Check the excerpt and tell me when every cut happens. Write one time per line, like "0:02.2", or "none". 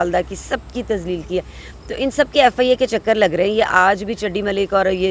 none